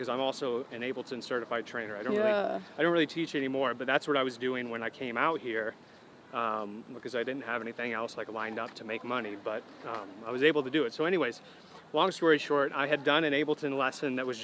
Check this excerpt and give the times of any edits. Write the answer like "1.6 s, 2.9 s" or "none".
none